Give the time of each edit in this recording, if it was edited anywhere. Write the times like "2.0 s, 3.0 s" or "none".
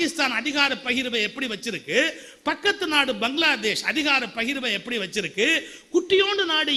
none